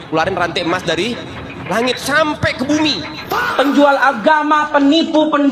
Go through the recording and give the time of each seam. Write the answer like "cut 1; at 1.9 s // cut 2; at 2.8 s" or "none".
cut 1; at 3.4 s